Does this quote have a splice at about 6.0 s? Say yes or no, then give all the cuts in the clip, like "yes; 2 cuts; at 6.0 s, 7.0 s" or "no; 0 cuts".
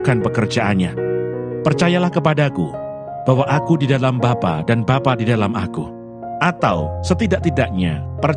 no; 0 cuts